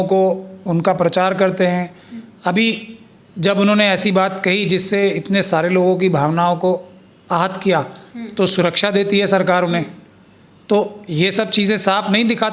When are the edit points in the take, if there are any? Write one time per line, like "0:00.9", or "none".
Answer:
none